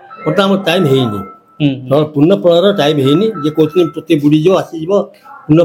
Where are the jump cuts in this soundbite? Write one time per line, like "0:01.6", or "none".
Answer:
none